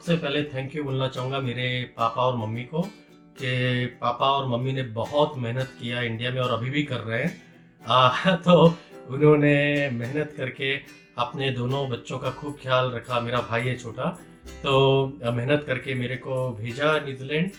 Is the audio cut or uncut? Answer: uncut